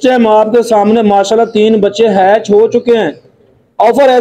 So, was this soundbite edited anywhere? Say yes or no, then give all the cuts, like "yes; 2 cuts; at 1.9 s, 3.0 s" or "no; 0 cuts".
no; 0 cuts